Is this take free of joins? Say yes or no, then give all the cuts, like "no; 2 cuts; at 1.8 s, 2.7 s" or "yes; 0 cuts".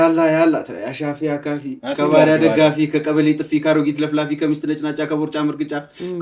yes; 0 cuts